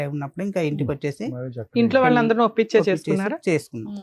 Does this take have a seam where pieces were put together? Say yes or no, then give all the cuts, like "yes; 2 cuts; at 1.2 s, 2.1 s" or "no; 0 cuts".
no; 0 cuts